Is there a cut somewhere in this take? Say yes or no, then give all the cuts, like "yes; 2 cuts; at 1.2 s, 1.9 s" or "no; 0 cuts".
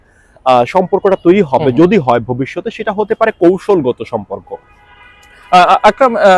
no; 0 cuts